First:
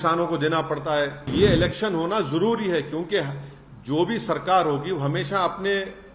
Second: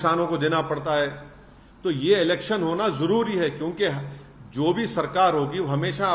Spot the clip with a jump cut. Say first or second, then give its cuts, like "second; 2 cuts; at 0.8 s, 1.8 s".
first; 1 cut; at 1.3 s